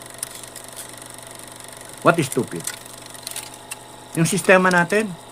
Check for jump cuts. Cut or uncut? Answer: uncut